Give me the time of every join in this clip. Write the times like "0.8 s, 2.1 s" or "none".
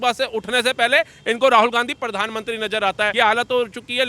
3.1 s